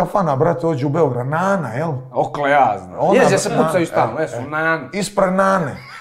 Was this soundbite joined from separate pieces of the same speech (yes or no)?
no